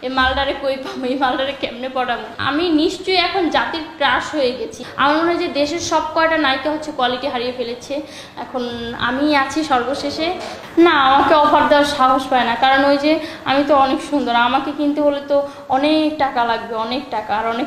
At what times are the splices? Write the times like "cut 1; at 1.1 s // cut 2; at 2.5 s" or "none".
cut 1; at 2.3 s // cut 2; at 4.8 s // cut 3; at 10.5 s

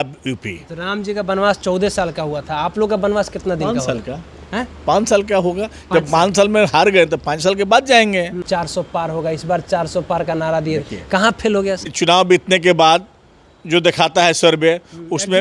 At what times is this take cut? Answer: cut 1; at 8.4 s // cut 2; at 12.3 s

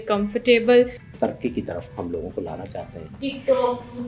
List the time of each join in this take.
cut 1; at 1.0 s // cut 2; at 3.0 s

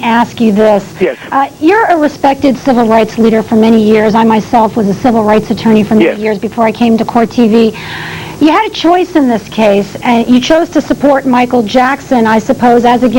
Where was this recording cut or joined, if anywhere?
none

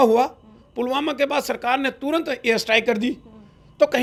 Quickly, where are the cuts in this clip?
none

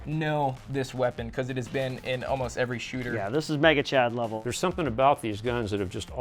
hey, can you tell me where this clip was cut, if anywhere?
cut 1; at 4.3 s

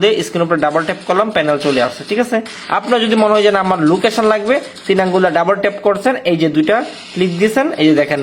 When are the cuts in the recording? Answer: cut 1; at 2.6 s

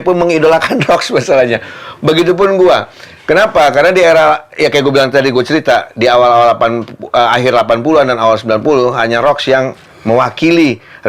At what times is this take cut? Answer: none

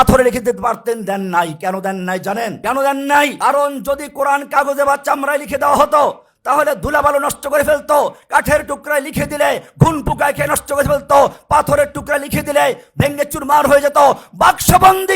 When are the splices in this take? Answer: cut 1; at 2.6 s // cut 2; at 3.3 s

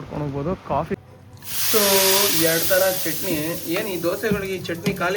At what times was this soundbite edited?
cut 1; at 1.0 s

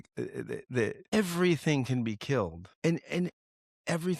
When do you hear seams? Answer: cut 1; at 1.1 s // cut 2; at 2.7 s

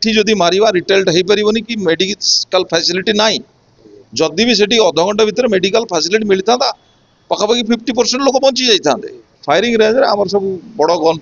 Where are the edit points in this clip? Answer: cut 1; at 9.3 s

